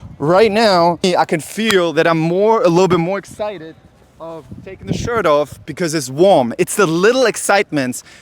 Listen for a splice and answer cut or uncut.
cut